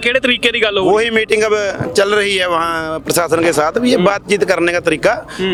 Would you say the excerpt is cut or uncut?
uncut